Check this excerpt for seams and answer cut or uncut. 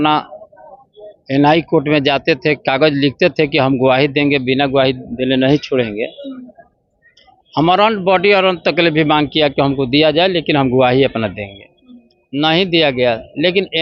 uncut